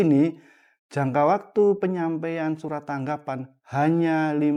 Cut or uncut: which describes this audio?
uncut